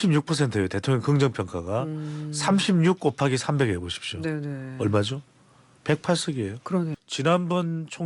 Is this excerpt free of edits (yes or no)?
no